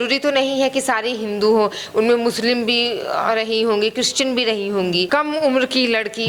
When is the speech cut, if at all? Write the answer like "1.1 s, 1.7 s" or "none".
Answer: 5.1 s